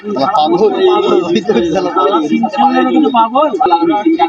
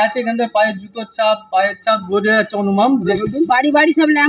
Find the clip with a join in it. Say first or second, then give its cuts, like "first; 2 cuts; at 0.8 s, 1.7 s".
second; 1 cut; at 3.1 s